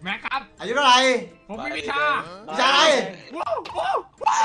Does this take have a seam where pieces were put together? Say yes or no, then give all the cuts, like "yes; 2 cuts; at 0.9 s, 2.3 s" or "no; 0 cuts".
yes; 1 cut; at 1.4 s